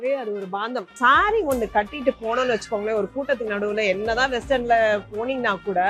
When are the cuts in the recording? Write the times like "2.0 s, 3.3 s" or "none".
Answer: 0.9 s